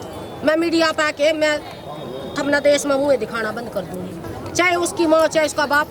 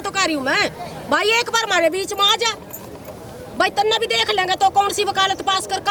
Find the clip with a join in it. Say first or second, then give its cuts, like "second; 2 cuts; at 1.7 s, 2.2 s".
first; 1 cut; at 4.2 s